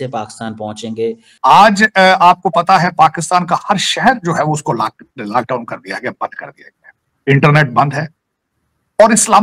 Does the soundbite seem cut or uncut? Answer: cut